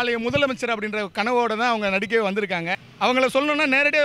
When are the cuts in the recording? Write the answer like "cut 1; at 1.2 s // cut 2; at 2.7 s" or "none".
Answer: cut 1; at 2.8 s